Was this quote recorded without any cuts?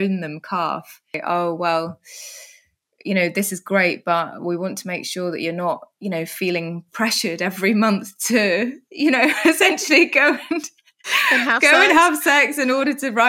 no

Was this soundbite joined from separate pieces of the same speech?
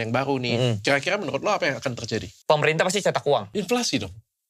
yes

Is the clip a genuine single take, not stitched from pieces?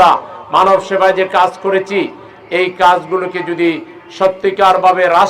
yes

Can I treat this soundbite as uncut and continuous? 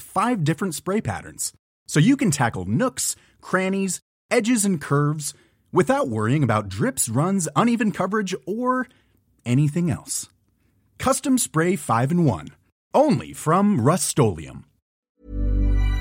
no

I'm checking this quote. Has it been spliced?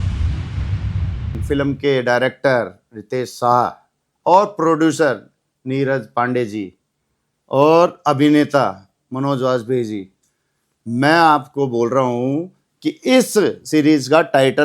yes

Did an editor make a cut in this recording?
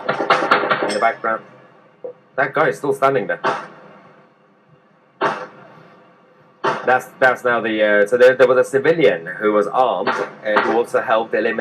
no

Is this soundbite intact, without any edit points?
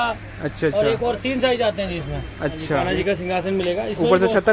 no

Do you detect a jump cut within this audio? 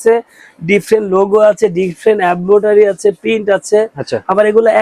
no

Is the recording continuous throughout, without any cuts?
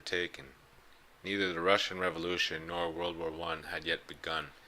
no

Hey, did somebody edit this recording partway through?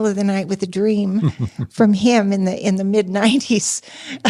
no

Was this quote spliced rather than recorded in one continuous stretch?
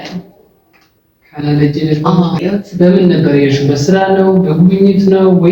yes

